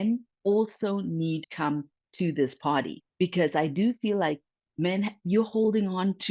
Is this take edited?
yes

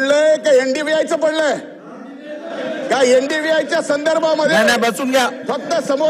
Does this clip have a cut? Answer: no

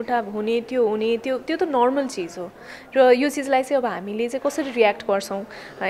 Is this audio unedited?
yes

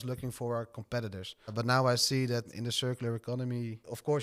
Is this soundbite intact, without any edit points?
yes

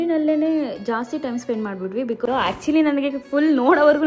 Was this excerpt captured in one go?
no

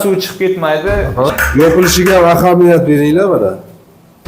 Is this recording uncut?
no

